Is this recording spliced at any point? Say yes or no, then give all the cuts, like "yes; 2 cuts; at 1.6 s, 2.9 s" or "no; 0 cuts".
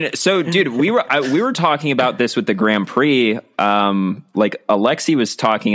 no; 0 cuts